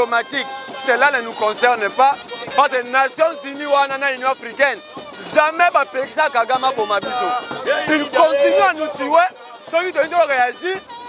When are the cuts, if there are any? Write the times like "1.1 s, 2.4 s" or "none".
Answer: none